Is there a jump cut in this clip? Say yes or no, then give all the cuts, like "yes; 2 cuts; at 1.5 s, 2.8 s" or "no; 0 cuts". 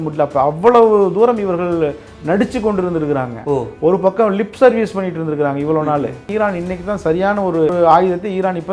yes; 2 cuts; at 6.2 s, 7.7 s